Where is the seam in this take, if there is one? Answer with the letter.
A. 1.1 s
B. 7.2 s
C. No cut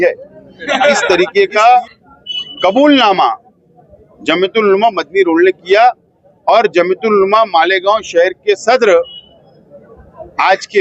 A